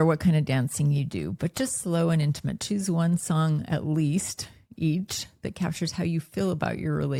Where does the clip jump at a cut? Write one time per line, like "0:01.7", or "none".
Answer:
none